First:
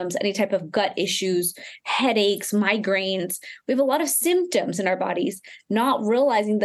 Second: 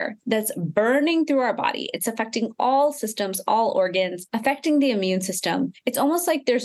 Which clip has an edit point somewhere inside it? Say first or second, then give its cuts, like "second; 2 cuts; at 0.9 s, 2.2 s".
second; 2 cuts; at 4.2 s, 5.8 s